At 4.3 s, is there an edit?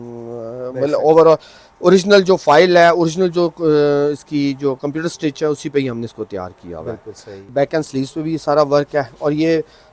no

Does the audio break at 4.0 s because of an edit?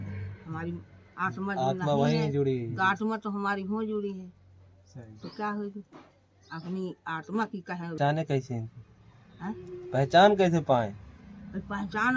no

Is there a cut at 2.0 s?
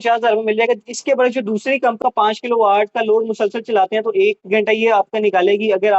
yes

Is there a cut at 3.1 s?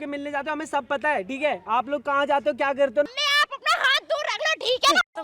yes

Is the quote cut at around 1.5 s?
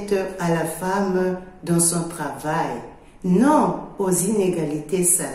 yes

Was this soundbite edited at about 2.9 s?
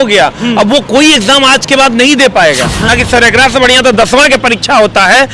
yes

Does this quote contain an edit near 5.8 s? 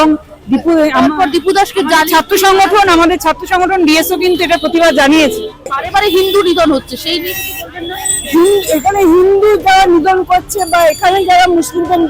yes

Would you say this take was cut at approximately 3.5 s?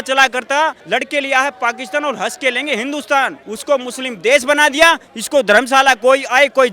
yes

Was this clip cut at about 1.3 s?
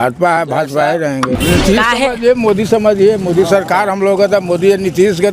yes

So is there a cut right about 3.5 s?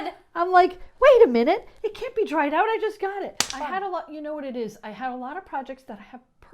yes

